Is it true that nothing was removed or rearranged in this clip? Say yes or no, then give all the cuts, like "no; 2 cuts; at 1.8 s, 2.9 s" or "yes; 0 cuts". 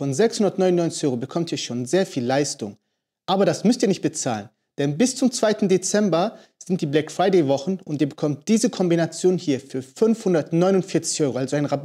yes; 0 cuts